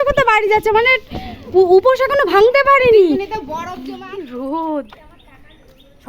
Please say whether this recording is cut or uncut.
cut